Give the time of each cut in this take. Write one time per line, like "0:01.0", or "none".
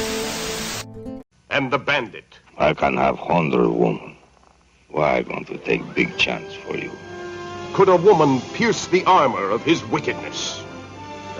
0:01.4